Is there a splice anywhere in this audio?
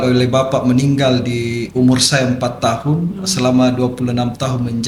no; 0 cuts

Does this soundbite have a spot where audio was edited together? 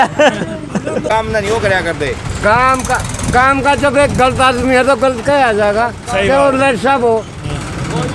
yes; 1 cut; at 1.1 s

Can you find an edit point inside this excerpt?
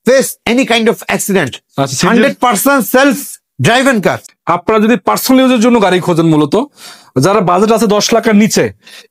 yes; 1 cut; at 4.2 s

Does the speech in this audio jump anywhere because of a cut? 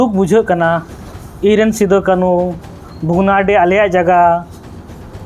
no; 0 cuts

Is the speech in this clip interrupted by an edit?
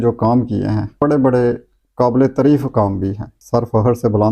yes; 2 cuts; at 0.9 s, 3.4 s

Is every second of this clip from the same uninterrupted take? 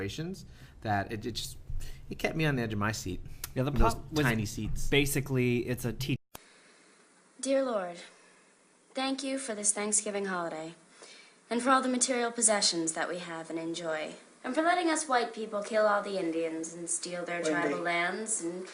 yes; 0 cuts

